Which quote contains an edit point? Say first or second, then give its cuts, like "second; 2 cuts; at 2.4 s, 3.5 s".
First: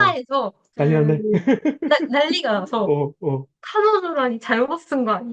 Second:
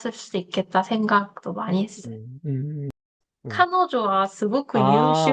second; 1 cut; at 3.0 s